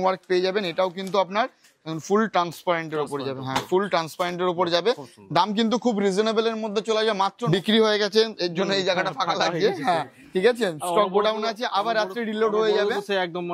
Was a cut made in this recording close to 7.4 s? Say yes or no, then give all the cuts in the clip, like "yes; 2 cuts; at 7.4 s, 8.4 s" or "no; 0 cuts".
yes; 1 cut; at 7.4 s